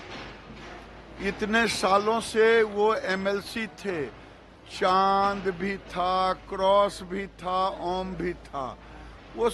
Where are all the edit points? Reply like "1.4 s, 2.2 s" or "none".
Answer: none